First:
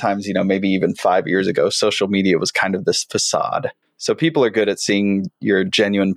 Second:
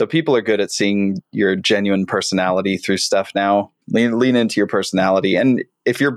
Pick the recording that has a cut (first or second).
second